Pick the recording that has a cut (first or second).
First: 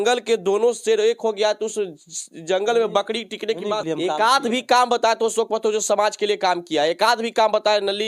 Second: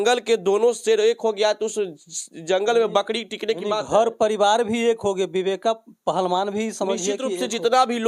first